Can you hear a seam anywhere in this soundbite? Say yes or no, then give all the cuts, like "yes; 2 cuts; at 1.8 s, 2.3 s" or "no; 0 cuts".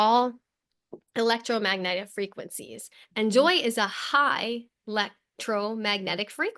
no; 0 cuts